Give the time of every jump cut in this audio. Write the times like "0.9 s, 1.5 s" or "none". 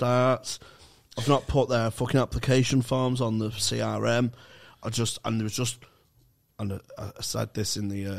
none